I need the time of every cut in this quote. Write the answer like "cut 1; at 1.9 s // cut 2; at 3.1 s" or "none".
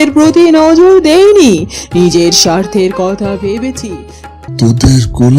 cut 1; at 4.2 s